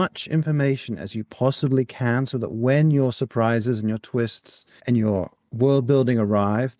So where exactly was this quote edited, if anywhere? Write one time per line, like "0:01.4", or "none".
none

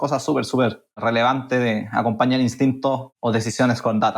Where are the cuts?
0:01.0
0:03.1

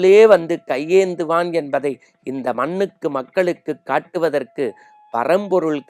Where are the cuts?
none

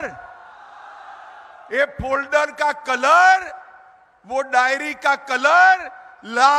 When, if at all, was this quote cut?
none

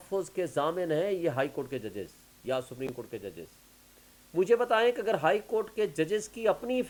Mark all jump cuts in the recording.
none

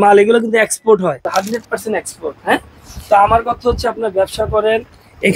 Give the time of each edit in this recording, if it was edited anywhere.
0:01.2

